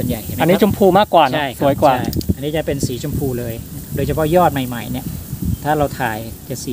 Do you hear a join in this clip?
no; 0 cuts

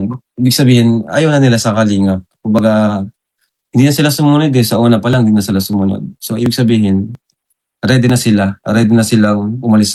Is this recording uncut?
yes; 0 cuts

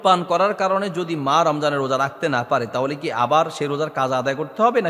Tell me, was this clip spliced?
no; 0 cuts

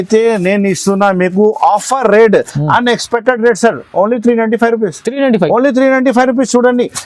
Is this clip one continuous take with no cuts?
yes; 0 cuts

